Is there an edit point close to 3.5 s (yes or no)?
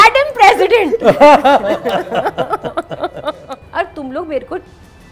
yes